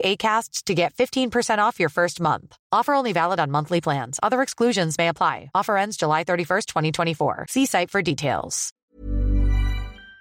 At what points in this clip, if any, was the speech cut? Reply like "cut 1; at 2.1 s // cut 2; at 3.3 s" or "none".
cut 1; at 8.9 s